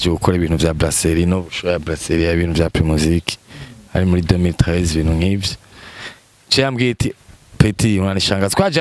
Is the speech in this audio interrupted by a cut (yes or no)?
no